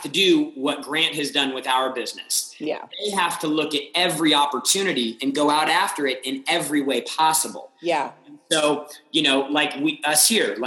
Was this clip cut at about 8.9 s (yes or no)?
no